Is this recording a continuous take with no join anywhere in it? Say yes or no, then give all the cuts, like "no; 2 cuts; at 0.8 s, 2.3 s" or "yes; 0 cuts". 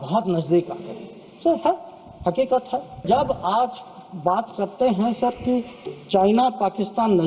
no; 1 cut; at 3.0 s